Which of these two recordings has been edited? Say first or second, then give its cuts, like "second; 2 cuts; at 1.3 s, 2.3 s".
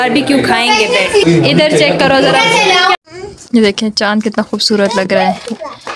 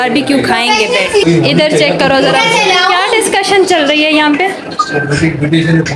first; 1 cut; at 3.0 s